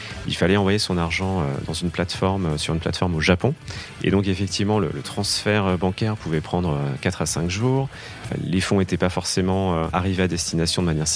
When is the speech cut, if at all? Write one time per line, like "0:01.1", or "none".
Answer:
0:08.3
0:09.9